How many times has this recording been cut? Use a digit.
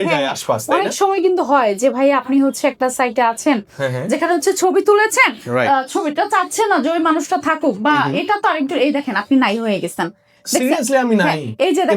0